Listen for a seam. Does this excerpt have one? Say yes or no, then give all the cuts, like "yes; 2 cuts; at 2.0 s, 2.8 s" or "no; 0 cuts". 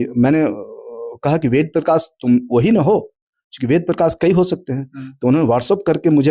no; 0 cuts